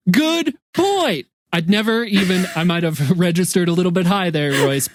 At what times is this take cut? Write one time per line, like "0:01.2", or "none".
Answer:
none